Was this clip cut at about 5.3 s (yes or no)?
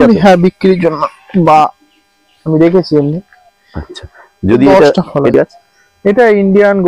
yes